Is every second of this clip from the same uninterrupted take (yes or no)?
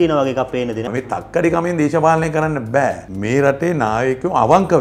no